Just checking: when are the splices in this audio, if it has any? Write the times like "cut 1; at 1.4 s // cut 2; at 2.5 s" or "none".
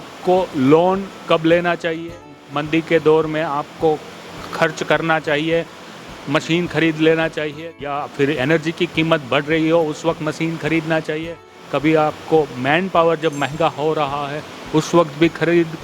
cut 1; at 2.2 s // cut 2; at 7.5 s